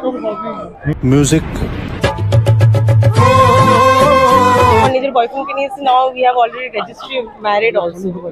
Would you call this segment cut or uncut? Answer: cut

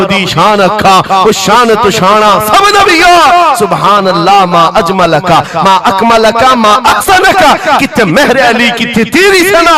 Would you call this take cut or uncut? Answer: uncut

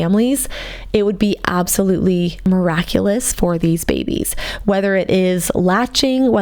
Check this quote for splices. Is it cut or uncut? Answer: cut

